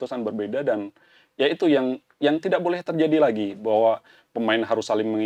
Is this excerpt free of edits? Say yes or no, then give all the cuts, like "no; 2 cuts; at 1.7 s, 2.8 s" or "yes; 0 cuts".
yes; 0 cuts